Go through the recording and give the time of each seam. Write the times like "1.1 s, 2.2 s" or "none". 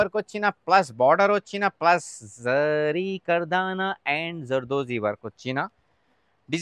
none